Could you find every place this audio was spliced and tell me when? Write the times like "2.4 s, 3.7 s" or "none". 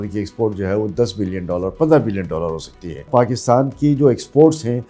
3.1 s

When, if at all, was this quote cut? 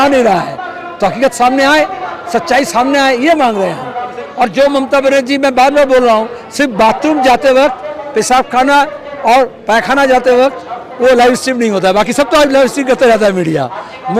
none

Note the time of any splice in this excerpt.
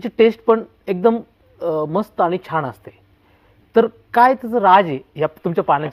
none

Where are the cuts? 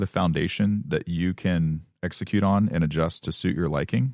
none

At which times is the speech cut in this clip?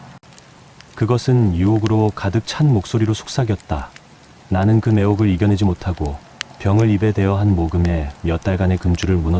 none

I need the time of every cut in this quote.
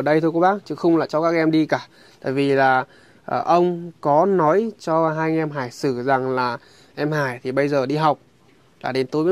none

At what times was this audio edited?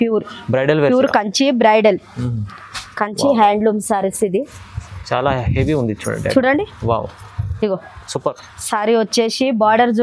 none

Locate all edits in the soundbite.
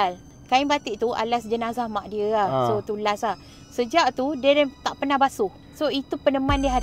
5.6 s

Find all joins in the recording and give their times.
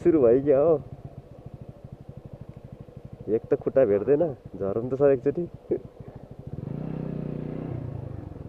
none

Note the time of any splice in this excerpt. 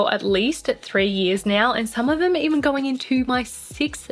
none

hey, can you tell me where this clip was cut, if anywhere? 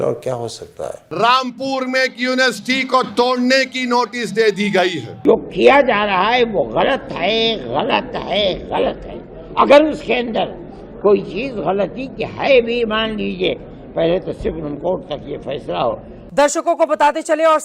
1.0 s, 5.1 s, 16.1 s

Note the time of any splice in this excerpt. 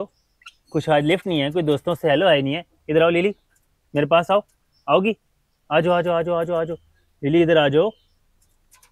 none

